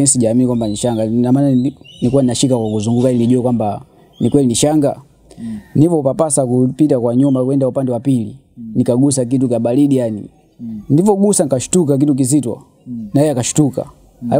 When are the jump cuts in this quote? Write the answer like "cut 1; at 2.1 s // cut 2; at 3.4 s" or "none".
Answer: none